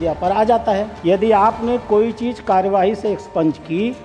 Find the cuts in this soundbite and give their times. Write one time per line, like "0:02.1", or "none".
0:00.9

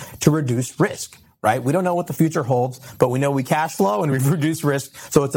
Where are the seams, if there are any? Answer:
none

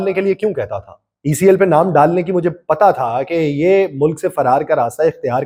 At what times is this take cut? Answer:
none

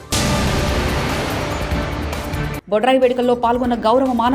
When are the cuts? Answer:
0:02.1

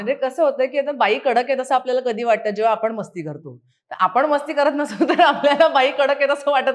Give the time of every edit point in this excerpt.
none

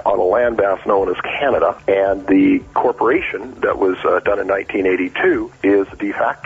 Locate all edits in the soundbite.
0:01.8
0:05.5

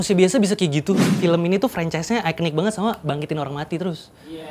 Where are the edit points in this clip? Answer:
0:01.1

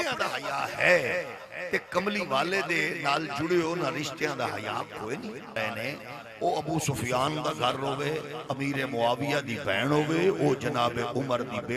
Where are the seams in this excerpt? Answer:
0:05.5

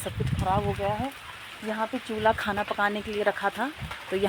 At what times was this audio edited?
none

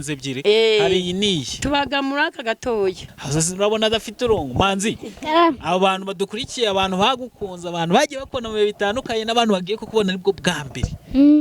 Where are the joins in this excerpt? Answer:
0:03.0

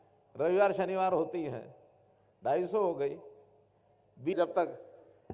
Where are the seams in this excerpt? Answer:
0:04.3

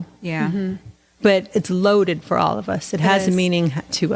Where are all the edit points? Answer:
0:01.5

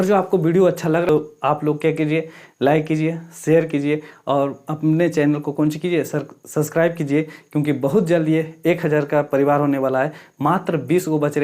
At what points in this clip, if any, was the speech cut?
0:01.1

